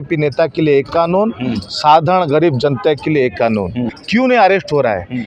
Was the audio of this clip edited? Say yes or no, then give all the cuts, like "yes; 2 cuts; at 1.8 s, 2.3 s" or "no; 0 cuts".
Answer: yes; 1 cut; at 4.0 s